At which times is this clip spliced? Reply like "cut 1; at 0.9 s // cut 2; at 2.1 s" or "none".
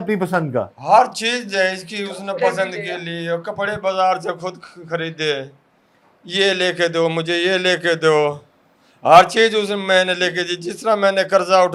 none